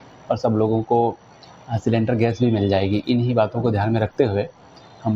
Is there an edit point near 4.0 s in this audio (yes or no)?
no